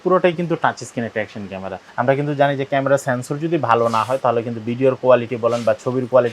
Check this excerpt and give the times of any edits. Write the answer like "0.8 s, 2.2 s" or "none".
1.8 s